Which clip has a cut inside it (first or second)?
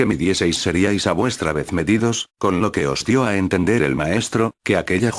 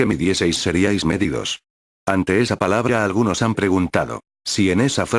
first